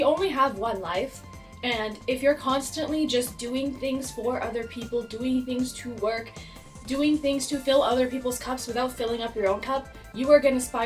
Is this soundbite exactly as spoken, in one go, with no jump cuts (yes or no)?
yes